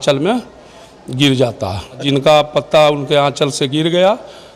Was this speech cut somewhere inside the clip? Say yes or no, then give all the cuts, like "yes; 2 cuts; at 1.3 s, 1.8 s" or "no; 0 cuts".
yes; 1 cut; at 2.0 s